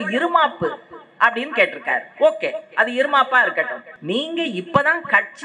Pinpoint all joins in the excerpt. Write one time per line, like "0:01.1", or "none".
0:03.9